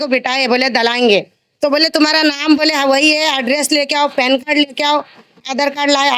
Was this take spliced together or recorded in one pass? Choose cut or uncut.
uncut